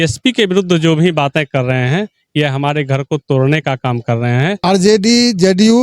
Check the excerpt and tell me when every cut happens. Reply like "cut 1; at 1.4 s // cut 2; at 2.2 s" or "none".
cut 1; at 4.6 s